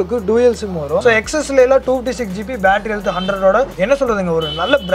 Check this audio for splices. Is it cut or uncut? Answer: cut